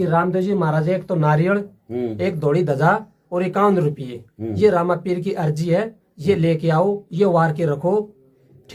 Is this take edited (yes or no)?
no